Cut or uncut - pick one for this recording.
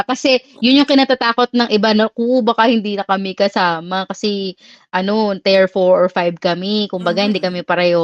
uncut